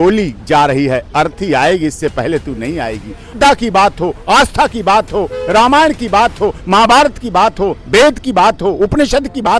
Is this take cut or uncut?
cut